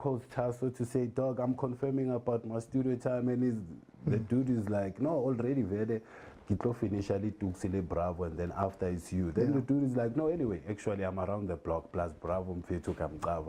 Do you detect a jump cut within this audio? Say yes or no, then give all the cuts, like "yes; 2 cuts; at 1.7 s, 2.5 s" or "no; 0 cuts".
no; 0 cuts